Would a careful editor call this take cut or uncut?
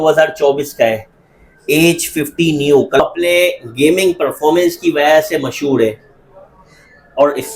cut